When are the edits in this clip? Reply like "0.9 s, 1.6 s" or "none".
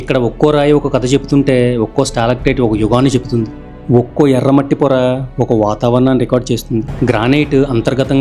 6.9 s